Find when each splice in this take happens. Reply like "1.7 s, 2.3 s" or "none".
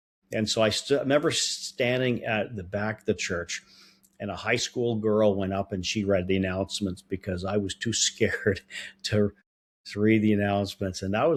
none